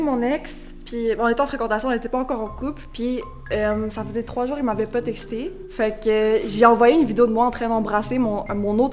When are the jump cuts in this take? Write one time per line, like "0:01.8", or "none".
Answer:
none